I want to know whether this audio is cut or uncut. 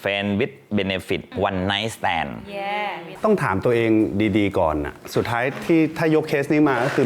cut